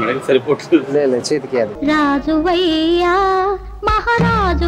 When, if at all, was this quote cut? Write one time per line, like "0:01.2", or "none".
none